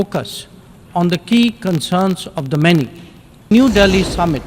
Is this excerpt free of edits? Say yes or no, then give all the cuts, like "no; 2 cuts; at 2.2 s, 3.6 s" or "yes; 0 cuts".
no; 1 cut; at 3.5 s